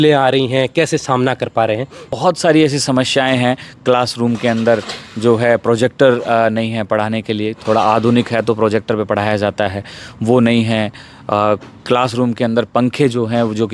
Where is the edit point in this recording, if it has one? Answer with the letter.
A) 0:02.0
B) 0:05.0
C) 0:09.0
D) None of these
A